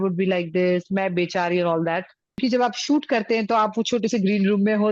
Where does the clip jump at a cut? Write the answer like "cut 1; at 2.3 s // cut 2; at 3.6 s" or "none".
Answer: cut 1; at 2.4 s

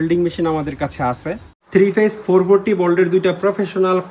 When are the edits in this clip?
cut 1; at 1.5 s

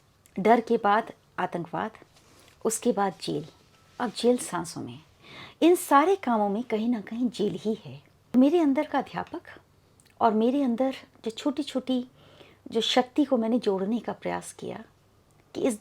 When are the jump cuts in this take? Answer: cut 1; at 8.3 s

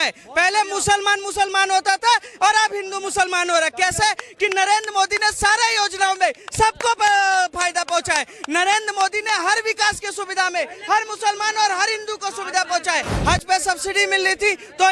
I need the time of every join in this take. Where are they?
cut 1; at 13.1 s

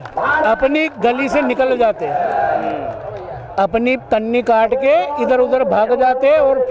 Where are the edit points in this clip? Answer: none

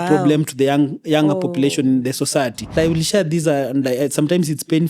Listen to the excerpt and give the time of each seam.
cut 1; at 2.7 s

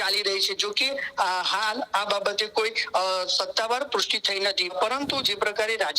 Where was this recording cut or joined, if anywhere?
cut 1; at 4.7 s

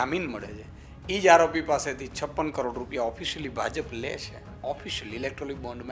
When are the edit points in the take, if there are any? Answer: none

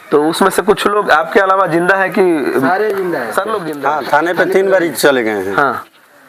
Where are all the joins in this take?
cut 1; at 3.7 s

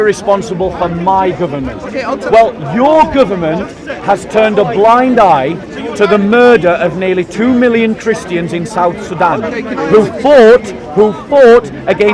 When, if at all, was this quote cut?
none

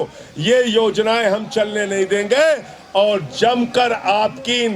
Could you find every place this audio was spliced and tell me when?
none

